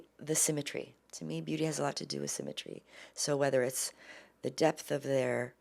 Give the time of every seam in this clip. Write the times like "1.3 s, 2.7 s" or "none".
none